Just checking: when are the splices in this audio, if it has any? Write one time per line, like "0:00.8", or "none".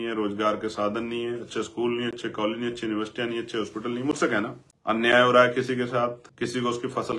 0:04.7
0:06.2